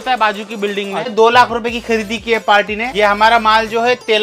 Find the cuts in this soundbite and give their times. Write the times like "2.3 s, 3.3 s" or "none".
1.1 s, 2.9 s

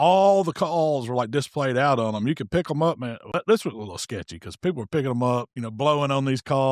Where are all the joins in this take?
3.3 s, 5.6 s

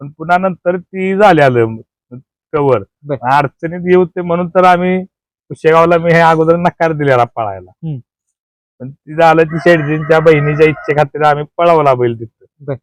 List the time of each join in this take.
none

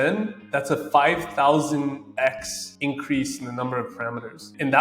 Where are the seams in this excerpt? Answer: none

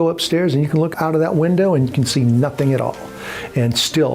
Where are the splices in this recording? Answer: 0.9 s

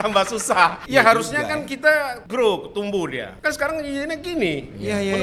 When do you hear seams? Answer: none

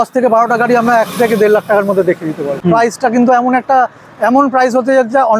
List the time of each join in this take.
2.6 s

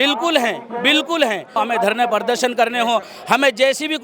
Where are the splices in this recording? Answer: 1.5 s

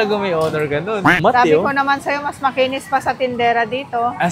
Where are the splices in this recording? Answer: 1.2 s

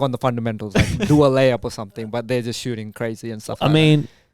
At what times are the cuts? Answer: none

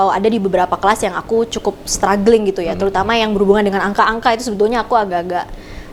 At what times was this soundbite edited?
none

